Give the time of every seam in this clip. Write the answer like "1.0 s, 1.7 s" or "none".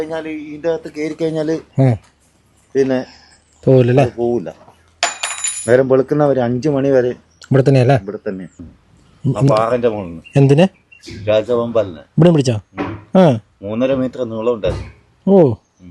none